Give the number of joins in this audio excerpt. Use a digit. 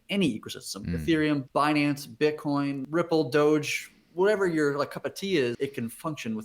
3